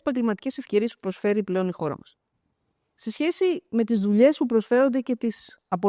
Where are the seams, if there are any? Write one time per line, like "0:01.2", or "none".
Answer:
none